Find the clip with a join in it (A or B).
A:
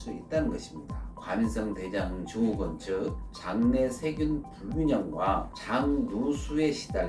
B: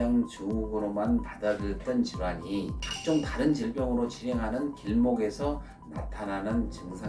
A